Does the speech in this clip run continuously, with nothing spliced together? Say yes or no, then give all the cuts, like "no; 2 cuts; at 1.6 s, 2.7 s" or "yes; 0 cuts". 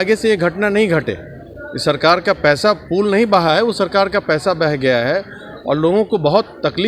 yes; 0 cuts